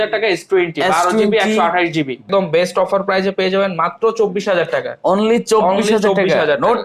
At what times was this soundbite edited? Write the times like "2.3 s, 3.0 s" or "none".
2.2 s